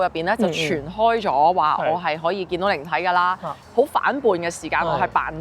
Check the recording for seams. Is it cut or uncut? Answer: cut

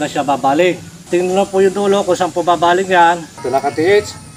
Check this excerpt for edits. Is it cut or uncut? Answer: cut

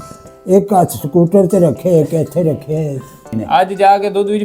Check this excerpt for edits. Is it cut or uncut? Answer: cut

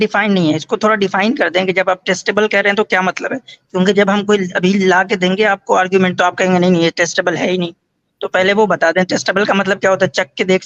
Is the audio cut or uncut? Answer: uncut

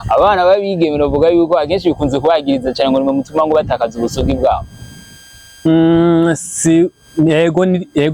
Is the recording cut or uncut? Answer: uncut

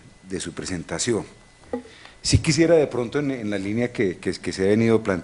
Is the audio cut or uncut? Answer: cut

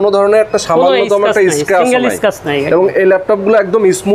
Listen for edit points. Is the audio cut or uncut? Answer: uncut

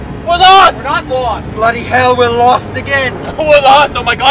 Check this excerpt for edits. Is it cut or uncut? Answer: cut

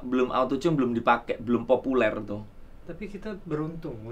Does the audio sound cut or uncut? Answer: uncut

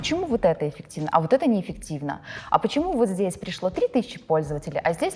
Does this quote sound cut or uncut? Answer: uncut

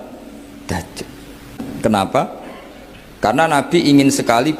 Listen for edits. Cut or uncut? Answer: cut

